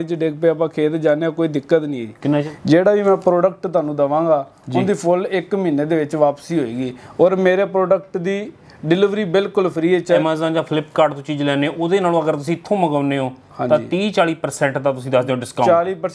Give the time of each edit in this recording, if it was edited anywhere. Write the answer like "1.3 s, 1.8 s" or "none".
2.5 s, 10.2 s